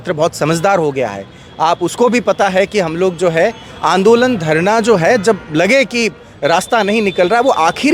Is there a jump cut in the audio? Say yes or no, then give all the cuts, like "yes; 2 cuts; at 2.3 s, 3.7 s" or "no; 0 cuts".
no; 0 cuts